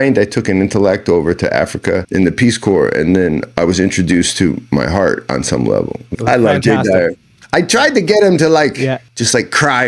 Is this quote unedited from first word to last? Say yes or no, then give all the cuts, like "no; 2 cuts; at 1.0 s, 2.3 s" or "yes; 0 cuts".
no; 3 cuts; at 2.1 s, 6.0 s, 9.1 s